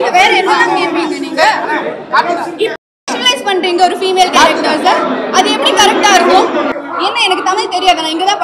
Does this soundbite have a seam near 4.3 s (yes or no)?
no